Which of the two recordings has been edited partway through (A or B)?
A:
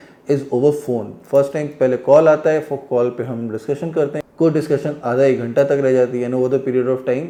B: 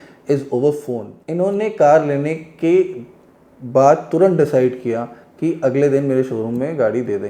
B